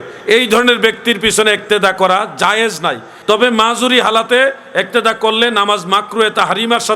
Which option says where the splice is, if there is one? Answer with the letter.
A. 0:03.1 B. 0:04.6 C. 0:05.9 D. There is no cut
A